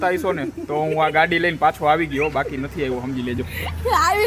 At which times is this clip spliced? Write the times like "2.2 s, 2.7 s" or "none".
none